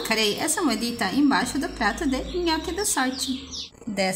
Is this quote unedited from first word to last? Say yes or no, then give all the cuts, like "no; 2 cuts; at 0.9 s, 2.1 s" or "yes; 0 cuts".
yes; 0 cuts